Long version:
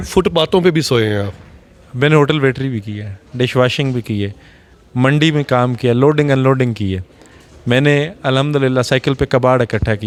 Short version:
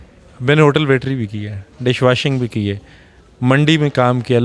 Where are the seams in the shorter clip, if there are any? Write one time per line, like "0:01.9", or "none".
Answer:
none